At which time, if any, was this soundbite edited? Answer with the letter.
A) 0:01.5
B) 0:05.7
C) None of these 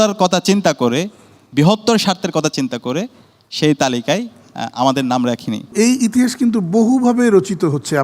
B